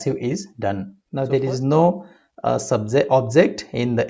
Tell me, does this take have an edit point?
yes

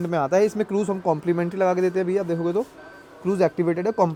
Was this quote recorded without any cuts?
yes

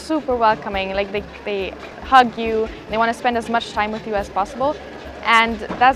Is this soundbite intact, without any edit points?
yes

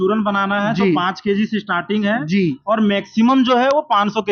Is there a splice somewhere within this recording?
no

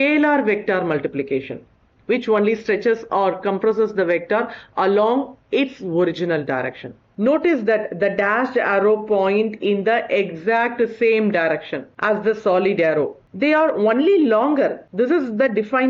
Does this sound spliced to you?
yes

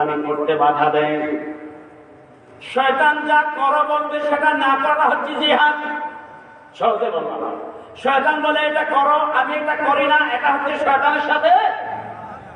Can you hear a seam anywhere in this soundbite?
no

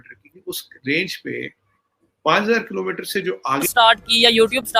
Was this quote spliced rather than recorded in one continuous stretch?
yes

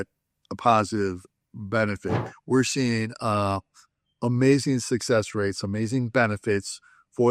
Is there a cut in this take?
yes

